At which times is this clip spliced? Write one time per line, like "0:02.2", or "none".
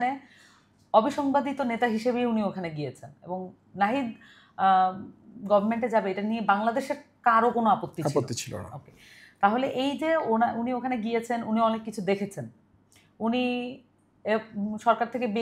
none